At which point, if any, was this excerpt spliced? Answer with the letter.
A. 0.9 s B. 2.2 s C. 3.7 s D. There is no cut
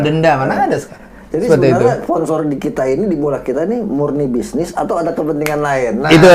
D